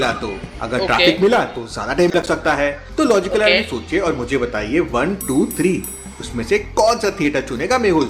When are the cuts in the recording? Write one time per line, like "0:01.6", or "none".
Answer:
none